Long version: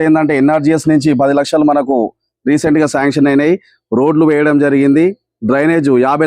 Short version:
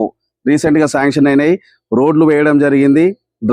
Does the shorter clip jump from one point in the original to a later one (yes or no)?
no